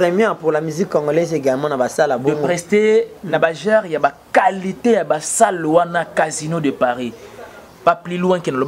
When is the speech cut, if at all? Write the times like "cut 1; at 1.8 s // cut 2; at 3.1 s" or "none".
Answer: none